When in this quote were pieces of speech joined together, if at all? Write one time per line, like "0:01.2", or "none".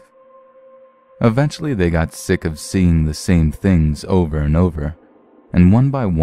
0:03.4